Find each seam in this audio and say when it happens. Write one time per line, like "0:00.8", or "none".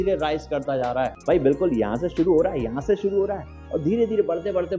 0:01.2

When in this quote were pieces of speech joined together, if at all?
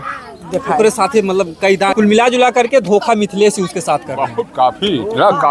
0:01.9

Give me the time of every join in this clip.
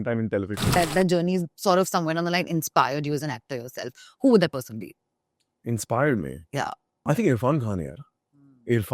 0:00.8
0:07.0

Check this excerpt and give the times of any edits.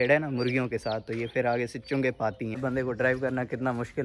0:02.6

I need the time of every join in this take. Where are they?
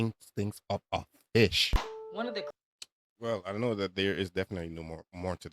0:01.8

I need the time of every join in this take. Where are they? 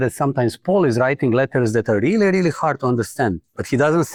none

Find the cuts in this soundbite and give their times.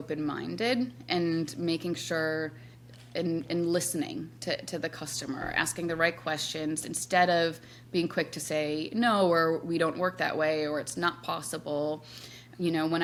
none

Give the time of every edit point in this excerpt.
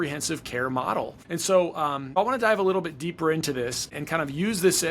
0:01.2
0:02.2
0:03.9

